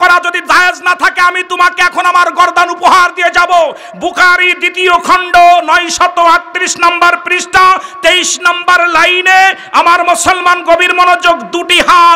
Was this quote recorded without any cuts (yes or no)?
yes